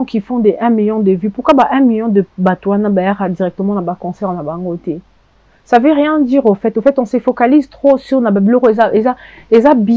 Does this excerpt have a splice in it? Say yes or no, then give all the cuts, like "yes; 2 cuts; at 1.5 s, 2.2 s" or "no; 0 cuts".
no; 0 cuts